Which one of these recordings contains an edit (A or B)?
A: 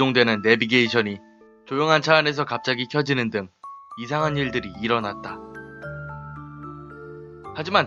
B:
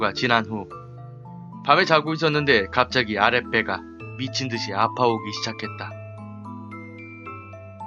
A